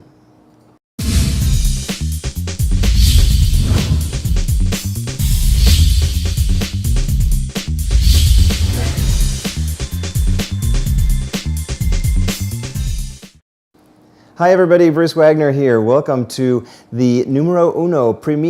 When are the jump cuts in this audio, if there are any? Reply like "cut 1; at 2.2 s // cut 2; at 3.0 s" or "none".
none

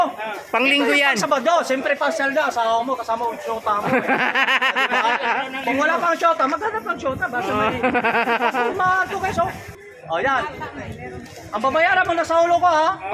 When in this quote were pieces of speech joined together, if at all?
cut 1; at 9.7 s

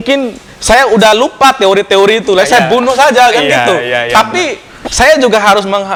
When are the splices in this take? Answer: none

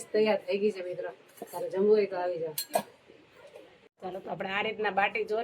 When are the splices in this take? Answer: cut 1; at 3.8 s

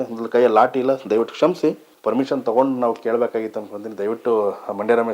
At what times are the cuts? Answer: cut 1; at 1.9 s

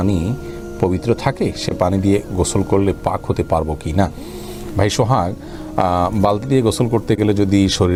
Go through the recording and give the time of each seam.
none

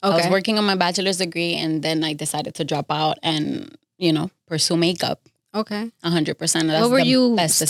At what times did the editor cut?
none

